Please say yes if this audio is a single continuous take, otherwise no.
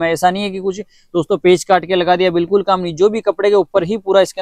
yes